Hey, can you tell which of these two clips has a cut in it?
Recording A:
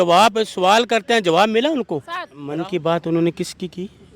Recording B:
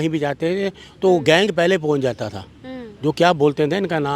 A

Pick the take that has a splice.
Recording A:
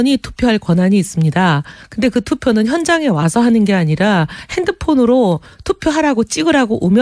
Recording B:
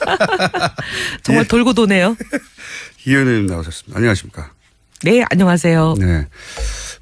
A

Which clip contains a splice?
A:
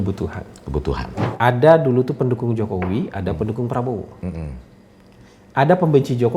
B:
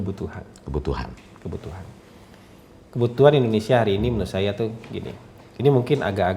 A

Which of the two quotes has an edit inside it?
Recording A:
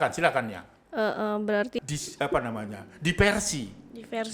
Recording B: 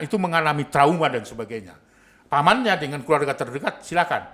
A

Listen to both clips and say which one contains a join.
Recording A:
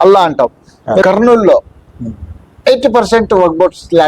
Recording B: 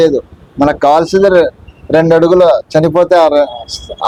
A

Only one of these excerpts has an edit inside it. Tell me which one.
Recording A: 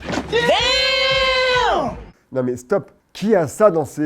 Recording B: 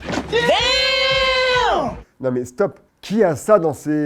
B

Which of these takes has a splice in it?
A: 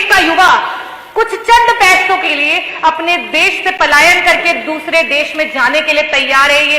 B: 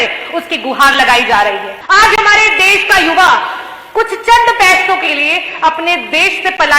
B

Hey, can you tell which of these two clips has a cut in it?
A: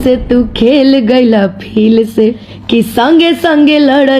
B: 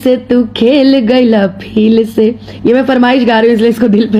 A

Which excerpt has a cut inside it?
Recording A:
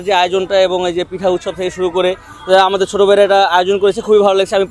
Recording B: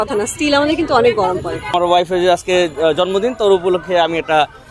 B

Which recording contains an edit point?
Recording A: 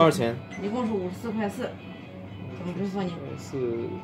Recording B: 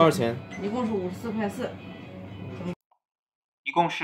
A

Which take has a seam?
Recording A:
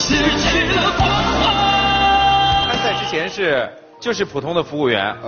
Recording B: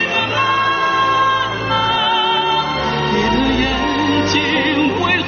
A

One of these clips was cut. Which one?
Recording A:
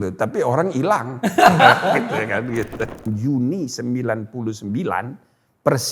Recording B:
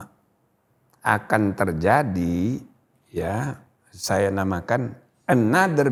A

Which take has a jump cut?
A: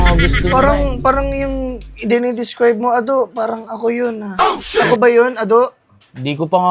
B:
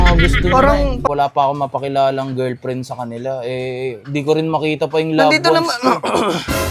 B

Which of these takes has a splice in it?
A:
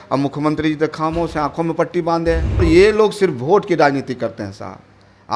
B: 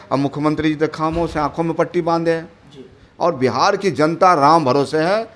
A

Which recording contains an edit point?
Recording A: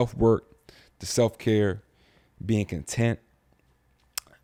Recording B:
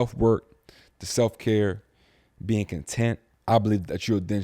B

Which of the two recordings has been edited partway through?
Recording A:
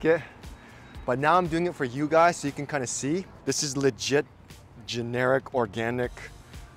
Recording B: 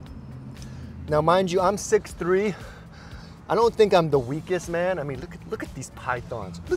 A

